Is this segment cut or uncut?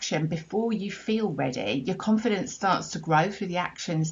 uncut